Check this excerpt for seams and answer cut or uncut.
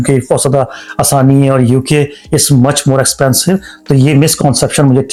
uncut